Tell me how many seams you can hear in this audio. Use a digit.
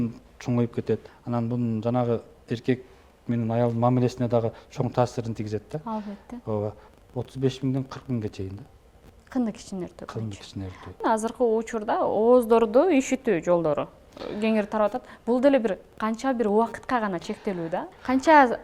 4